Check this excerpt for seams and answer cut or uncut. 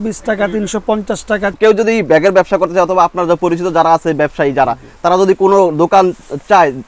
cut